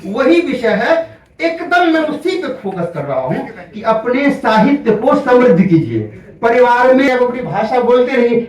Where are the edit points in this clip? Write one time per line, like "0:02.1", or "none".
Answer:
0:07.1